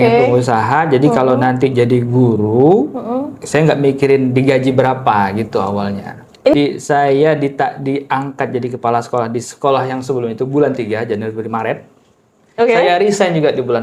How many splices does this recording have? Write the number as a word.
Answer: one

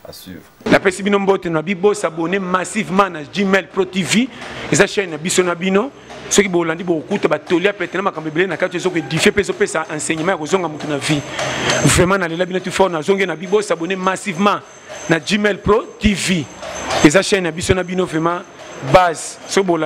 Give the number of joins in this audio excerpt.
zero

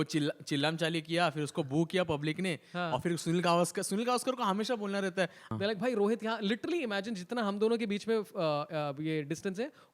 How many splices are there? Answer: one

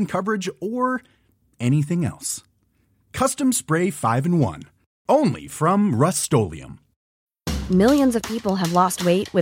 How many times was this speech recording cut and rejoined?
one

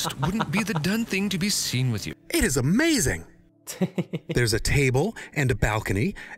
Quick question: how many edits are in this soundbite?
one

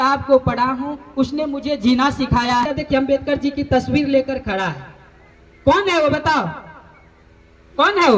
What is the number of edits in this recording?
one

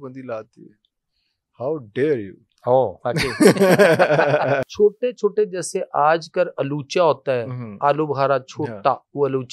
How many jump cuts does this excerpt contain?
one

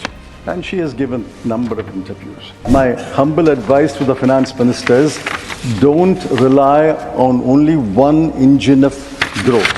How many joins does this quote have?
one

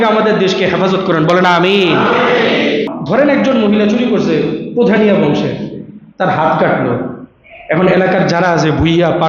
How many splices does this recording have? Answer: one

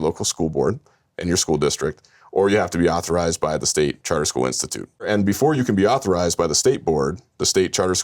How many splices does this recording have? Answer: one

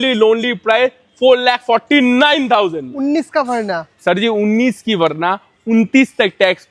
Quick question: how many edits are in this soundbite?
zero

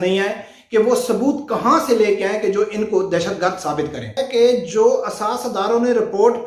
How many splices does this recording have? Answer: one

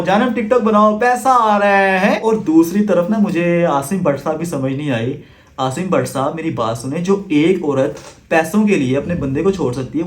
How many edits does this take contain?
one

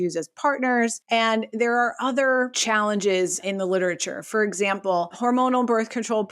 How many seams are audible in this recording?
three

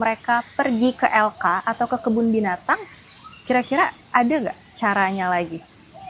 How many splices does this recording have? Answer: zero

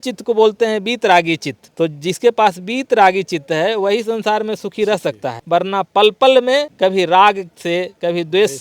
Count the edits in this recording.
three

